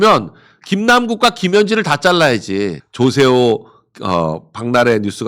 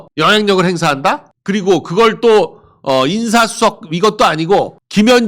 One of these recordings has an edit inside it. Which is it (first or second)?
first